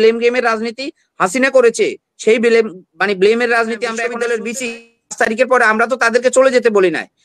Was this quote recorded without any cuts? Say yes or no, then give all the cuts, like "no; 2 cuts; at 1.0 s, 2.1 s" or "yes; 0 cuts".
no; 1 cut; at 4.0 s